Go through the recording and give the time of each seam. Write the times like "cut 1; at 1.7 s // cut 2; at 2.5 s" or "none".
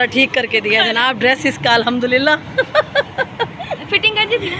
none